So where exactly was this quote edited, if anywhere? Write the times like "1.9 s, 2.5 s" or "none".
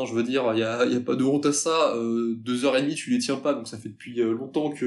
none